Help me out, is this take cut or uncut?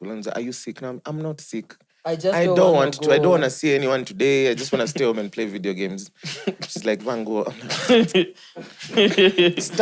uncut